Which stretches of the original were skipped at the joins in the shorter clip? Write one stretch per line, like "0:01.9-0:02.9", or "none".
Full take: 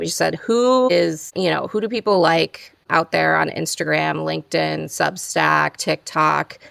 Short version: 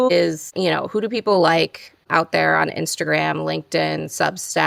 none